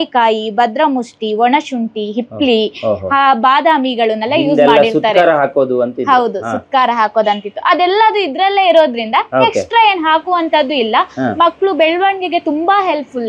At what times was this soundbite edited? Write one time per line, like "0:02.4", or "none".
none